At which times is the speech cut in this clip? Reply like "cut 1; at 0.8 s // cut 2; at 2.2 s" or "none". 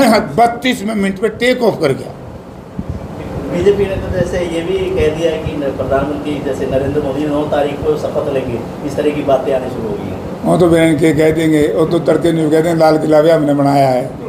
none